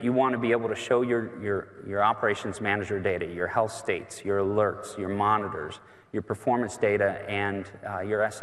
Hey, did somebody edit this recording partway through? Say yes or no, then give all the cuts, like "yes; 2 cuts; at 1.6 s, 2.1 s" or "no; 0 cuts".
no; 0 cuts